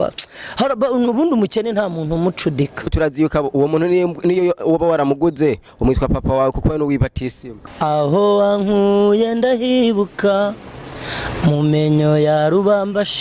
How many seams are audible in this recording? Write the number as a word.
two